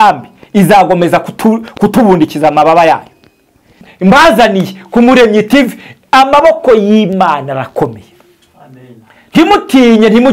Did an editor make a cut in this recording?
yes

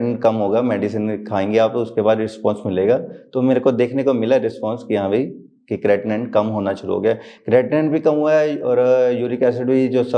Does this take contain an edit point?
no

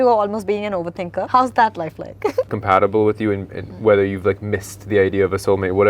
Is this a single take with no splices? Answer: no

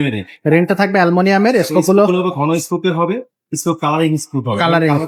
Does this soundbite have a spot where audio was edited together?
no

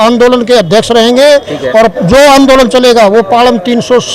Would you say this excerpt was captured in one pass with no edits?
yes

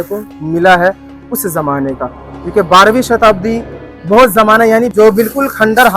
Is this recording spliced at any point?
yes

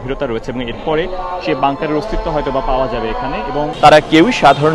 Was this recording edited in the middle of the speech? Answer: yes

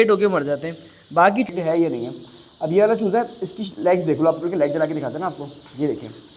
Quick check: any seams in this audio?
yes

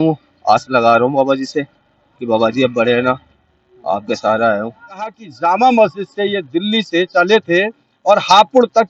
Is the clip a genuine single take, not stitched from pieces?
no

